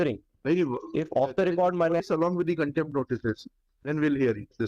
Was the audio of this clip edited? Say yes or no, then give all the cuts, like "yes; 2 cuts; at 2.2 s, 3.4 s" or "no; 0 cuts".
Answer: yes; 1 cut; at 2.0 s